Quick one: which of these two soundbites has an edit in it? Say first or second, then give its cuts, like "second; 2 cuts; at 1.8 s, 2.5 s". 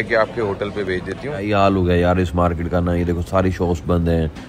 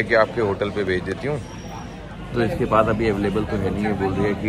first; 1 cut; at 1.4 s